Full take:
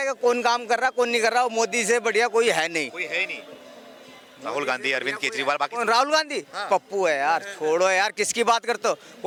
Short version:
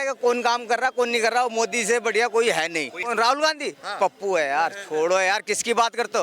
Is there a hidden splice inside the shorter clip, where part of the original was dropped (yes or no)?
yes